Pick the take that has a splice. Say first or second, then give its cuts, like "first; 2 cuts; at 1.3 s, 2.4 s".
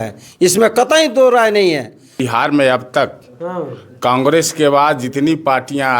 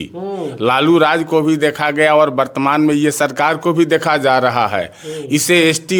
first; 1 cut; at 2.2 s